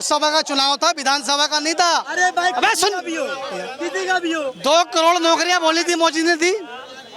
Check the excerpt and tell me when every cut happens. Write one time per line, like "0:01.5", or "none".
none